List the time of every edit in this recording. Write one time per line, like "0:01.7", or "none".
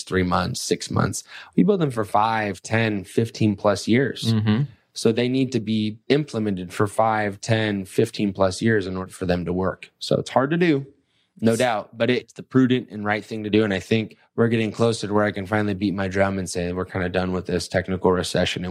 0:06.0
0:09.0
0:12.3
0:14.2